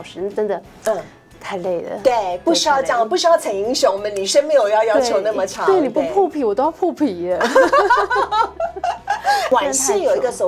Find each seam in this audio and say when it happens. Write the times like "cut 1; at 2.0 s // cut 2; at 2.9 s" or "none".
cut 1; at 9.5 s